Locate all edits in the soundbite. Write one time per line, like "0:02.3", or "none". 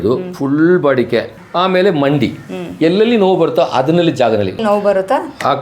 0:01.4
0:04.6